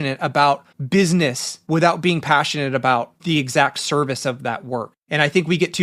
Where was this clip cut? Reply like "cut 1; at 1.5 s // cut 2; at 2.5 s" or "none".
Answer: cut 1; at 1.0 s // cut 2; at 3.2 s // cut 3; at 4.9 s